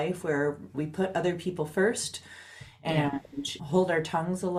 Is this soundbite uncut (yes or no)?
yes